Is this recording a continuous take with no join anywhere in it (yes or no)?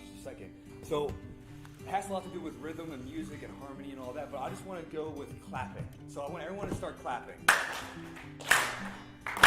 no